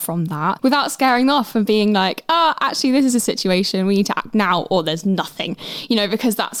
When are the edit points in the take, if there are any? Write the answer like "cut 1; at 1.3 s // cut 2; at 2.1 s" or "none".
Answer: none